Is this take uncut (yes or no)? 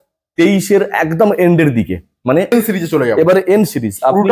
no